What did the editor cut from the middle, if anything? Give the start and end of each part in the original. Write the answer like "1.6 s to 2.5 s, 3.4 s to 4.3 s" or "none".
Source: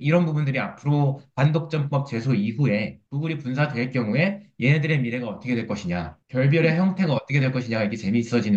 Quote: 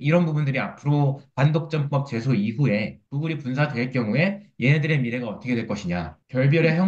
none